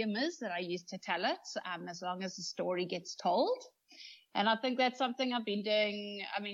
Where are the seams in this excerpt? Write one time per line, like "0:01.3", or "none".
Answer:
none